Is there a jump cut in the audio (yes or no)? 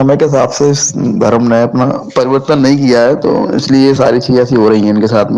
no